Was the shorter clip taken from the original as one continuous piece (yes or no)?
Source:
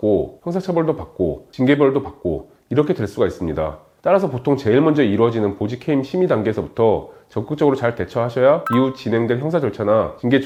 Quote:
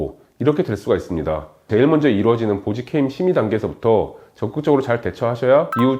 no